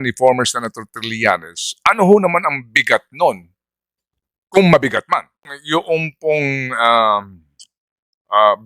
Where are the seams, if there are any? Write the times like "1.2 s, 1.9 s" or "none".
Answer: 5.5 s